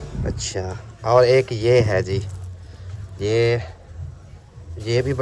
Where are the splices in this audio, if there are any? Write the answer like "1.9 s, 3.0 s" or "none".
none